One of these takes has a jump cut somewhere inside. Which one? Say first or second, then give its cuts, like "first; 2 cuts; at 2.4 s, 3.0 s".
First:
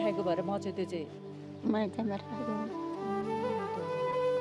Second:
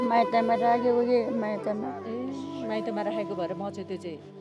first; 1 cut; at 3.3 s